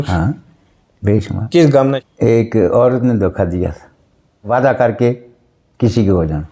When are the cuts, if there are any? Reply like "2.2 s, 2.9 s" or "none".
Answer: 2.0 s, 4.5 s

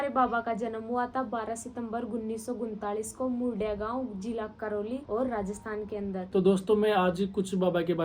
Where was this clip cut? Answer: 5.0 s, 6.2 s

